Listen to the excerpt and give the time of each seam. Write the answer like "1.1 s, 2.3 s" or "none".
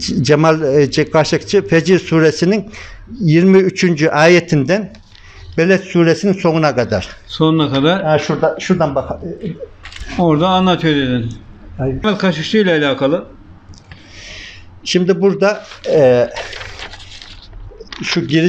12.0 s